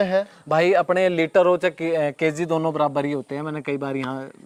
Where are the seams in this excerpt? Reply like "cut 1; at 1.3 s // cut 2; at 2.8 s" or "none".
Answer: none